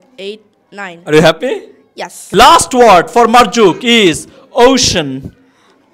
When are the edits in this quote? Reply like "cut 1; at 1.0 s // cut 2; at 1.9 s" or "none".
cut 1; at 2.1 s

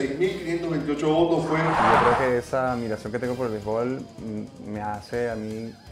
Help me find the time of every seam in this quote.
cut 1; at 1.8 s

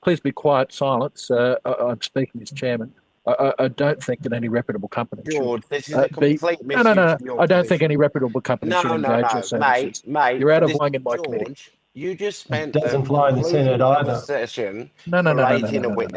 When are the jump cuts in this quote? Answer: cut 1; at 10.8 s

